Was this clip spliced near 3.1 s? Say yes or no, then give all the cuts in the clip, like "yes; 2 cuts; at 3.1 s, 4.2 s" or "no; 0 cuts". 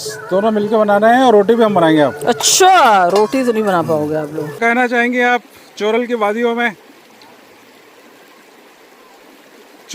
no; 1 cut; at 4.6 s